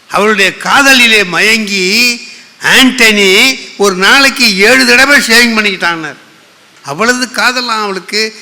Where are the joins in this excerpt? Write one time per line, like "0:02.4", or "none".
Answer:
0:06.7

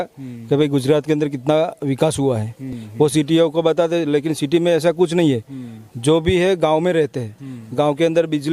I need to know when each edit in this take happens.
none

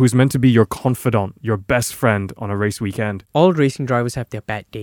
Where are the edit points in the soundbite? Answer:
0:03.2

